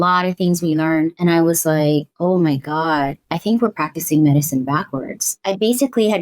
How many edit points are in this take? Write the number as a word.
three